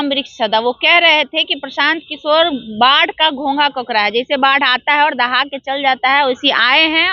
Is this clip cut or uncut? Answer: uncut